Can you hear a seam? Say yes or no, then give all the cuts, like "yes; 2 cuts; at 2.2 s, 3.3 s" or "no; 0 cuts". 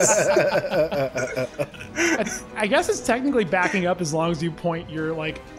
no; 0 cuts